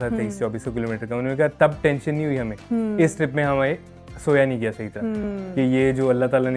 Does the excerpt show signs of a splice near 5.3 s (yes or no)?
yes